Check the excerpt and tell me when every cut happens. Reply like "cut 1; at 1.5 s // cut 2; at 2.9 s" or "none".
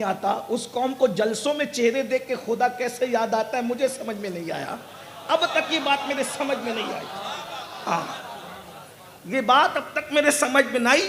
none